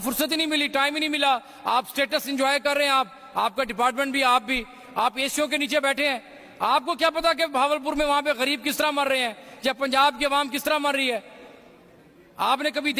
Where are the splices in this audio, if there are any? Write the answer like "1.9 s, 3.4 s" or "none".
none